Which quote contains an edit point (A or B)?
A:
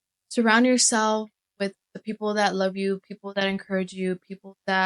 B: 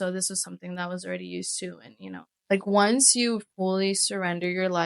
B